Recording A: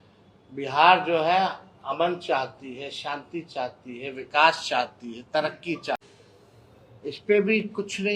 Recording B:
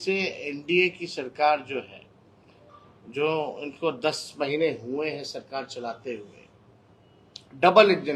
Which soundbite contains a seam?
A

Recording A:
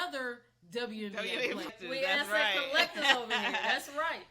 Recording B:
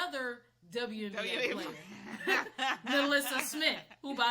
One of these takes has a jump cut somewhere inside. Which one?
A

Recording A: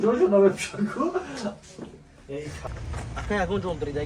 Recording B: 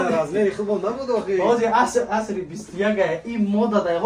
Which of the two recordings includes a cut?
A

